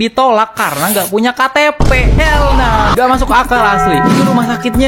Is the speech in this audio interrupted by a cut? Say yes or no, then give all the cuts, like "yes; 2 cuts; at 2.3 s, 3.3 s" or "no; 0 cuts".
no; 0 cuts